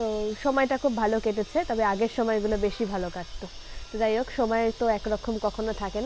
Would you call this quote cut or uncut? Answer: uncut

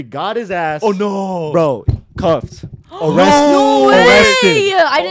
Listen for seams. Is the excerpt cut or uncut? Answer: uncut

